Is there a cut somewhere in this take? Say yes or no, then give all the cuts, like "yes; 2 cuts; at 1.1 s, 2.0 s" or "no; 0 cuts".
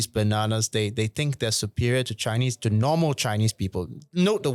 no; 0 cuts